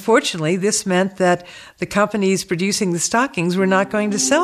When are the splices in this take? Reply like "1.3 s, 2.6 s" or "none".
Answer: none

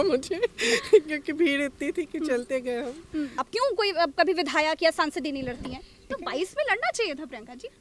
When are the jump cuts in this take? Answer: 3.4 s, 6.0 s

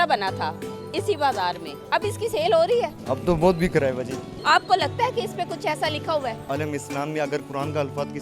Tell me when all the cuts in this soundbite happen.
1.7 s, 3.0 s, 4.3 s, 6.5 s

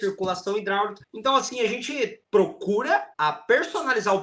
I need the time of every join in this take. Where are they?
1.0 s, 2.2 s, 3.1 s

